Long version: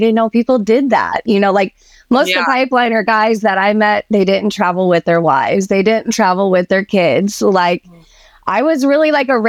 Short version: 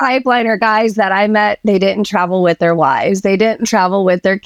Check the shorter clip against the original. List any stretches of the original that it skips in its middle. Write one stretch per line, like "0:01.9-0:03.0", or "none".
none